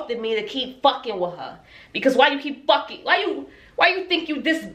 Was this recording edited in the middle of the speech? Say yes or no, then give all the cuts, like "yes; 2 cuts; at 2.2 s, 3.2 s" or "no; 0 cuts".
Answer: no; 0 cuts